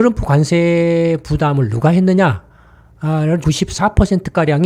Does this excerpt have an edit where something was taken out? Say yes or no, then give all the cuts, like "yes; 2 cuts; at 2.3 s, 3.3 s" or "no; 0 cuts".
no; 0 cuts